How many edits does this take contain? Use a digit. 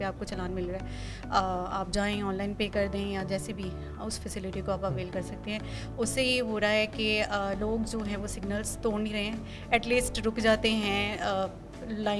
0